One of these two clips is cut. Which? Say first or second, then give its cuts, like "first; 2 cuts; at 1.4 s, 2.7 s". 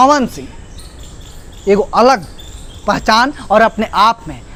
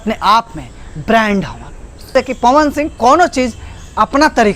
second; 1 cut; at 2.1 s